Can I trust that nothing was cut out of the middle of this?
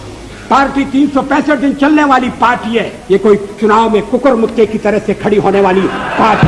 no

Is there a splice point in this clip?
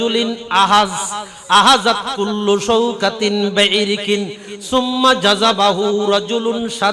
no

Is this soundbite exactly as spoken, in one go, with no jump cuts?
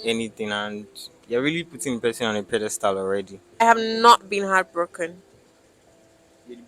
no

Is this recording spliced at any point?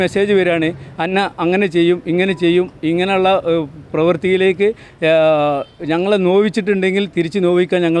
no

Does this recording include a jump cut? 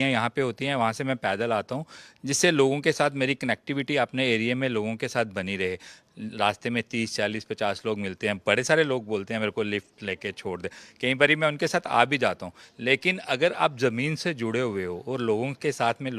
no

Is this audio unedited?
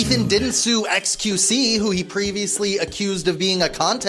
yes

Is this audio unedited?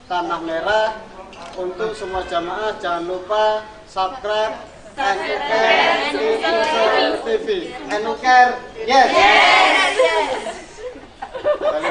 yes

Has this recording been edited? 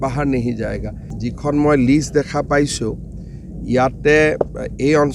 yes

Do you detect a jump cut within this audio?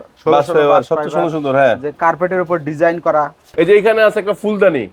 yes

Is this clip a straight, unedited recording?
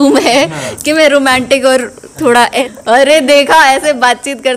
no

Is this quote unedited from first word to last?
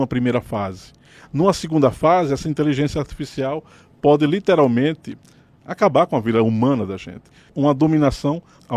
no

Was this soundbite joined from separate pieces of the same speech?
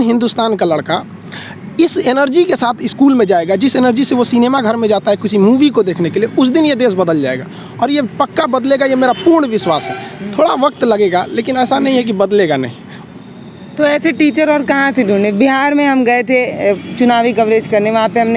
no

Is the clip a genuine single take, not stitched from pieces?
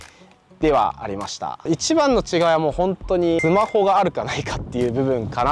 no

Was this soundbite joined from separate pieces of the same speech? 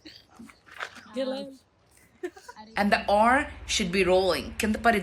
no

